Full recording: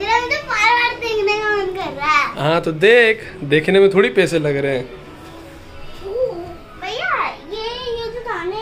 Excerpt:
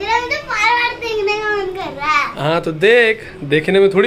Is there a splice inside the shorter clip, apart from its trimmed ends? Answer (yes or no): no